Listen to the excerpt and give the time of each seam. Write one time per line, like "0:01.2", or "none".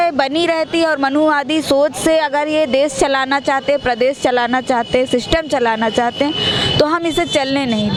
none